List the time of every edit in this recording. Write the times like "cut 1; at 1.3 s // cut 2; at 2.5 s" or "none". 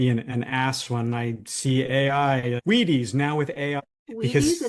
cut 1; at 2.6 s // cut 2; at 3.8 s